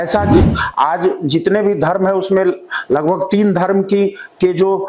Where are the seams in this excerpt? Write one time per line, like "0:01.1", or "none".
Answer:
none